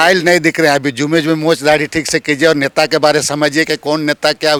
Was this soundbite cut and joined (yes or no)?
no